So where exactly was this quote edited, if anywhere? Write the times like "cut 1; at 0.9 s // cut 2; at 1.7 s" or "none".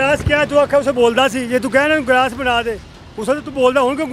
none